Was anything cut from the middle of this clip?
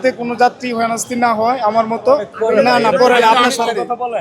yes; 1 cut; at 2.3 s

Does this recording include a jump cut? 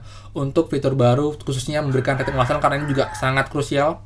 no; 0 cuts

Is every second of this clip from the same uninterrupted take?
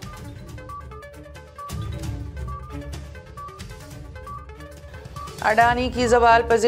yes; 0 cuts

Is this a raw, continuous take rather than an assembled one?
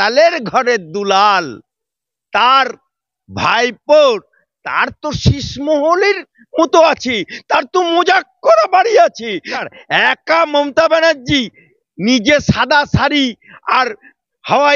no; 1 cut; at 9.5 s

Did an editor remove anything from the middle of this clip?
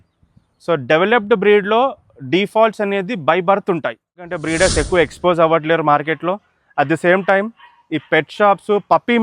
yes; 1 cut; at 4.4 s

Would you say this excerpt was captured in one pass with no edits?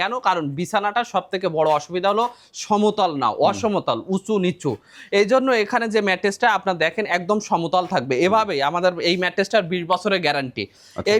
yes; 0 cuts

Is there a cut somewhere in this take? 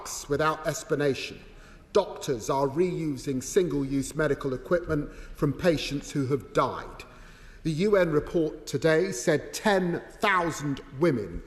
no; 0 cuts

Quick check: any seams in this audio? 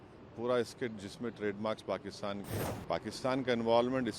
yes; 1 cut; at 2.5 s

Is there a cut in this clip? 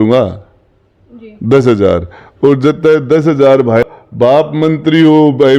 yes; 1 cut; at 3.8 s

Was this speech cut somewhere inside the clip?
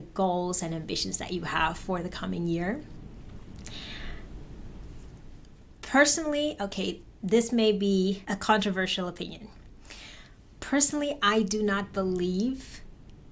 no; 0 cuts

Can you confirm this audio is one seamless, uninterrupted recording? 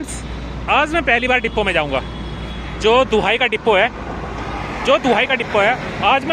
yes; 0 cuts

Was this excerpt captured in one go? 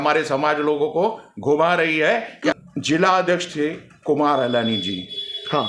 no; 1 cut; at 2.5 s

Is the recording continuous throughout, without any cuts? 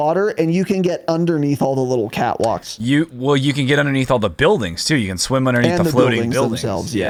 yes; 0 cuts

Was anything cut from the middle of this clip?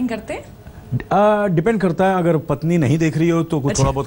no; 0 cuts

